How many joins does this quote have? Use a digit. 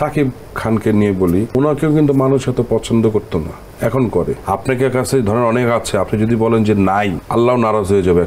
3